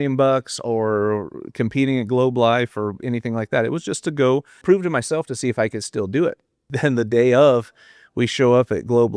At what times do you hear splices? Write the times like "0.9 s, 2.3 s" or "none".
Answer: 4.6 s, 6.6 s